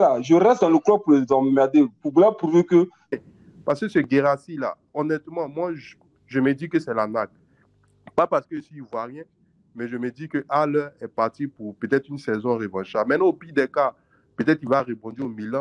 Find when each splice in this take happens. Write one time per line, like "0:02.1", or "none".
0:03.2